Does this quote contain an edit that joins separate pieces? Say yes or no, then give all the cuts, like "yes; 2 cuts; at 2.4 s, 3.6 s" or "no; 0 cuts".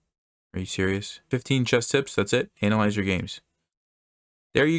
yes; 1 cut; at 1.3 s